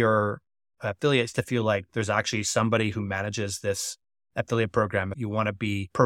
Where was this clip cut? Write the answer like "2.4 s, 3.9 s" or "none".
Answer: 5.1 s